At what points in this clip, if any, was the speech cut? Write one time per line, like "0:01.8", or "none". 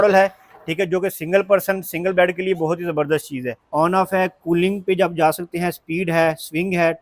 0:03.6